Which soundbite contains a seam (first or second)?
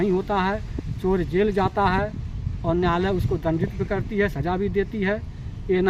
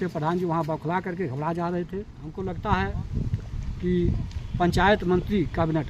second